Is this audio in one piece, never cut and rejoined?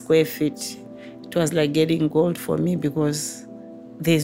yes; 0 cuts

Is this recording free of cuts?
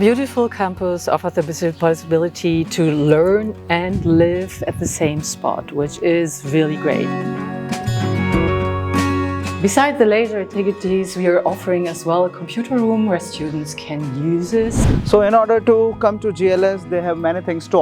no; 3 cuts; at 7.0 s, 9.6 s, 14.8 s

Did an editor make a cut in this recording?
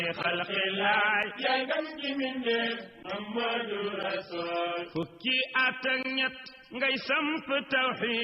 yes; 1 cut; at 1.8 s

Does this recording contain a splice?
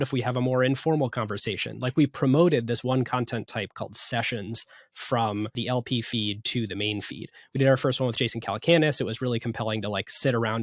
yes; 1 cut; at 5.5 s

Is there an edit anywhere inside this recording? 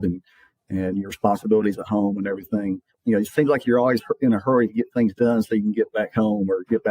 yes; 1 cut; at 3.0 s

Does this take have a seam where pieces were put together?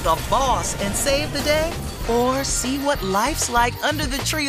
no; 0 cuts

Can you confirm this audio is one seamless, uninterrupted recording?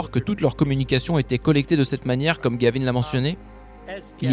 yes; 0 cuts

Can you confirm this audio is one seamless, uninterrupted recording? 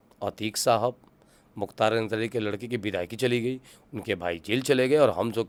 yes; 0 cuts

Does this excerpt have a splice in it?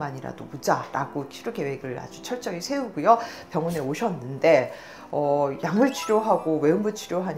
no; 0 cuts

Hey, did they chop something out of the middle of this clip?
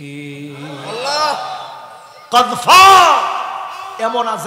no; 0 cuts

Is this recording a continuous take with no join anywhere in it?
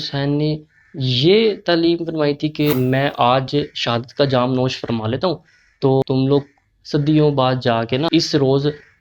no; 3 cuts; at 2.7 s, 6.0 s, 8.1 s

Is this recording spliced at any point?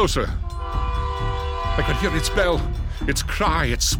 no; 0 cuts

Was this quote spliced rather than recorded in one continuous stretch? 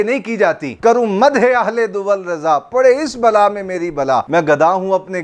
no; 0 cuts

